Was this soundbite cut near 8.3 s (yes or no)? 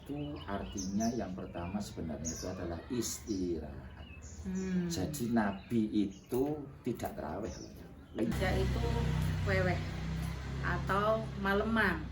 yes